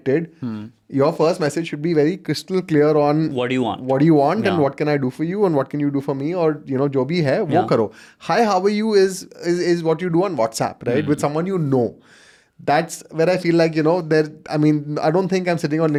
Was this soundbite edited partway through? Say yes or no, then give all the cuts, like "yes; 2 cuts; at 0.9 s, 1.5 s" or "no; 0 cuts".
no; 0 cuts